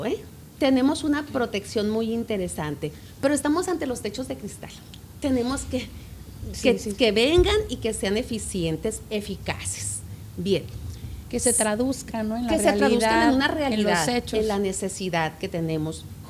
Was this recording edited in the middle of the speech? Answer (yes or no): no